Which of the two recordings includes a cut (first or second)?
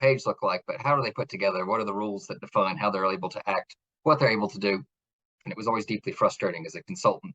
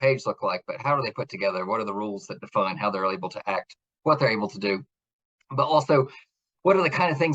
first